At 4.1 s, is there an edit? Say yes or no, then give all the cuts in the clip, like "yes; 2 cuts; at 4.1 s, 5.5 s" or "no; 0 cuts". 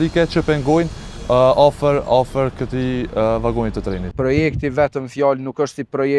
yes; 1 cut; at 4.1 s